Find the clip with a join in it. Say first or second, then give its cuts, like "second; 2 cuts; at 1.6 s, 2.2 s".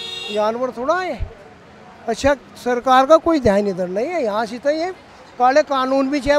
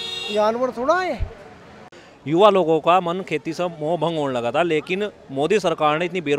second; 1 cut; at 1.9 s